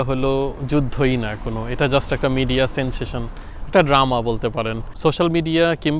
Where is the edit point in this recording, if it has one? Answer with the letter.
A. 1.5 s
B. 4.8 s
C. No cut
B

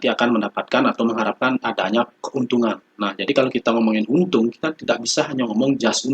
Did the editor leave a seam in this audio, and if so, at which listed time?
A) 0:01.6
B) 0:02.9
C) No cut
B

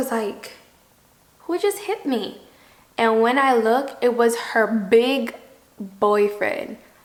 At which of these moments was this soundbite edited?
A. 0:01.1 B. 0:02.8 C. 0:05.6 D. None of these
D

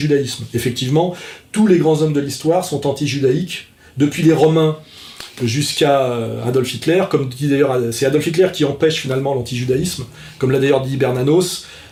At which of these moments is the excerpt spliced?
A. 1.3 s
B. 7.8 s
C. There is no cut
C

